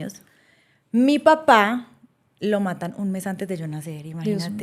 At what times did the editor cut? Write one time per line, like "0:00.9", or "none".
none